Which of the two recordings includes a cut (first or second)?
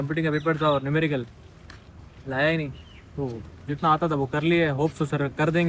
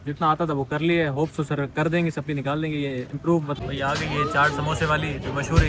second